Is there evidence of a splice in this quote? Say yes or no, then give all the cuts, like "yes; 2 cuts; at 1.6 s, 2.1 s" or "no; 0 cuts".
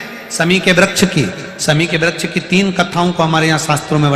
no; 0 cuts